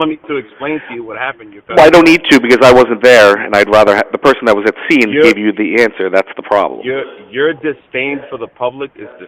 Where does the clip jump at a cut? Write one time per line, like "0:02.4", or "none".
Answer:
none